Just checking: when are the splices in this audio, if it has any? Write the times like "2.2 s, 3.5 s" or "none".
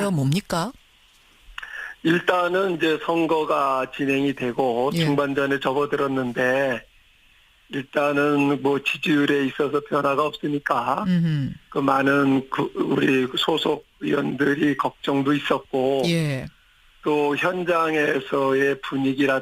6.6 s